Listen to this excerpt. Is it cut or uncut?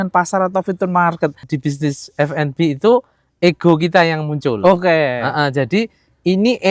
cut